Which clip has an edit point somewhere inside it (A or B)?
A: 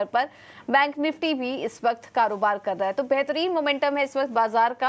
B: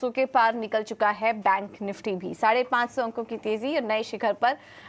B